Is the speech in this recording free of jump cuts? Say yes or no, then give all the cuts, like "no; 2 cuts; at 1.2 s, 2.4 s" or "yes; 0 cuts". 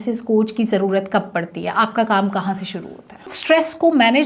no; 1 cut; at 3.3 s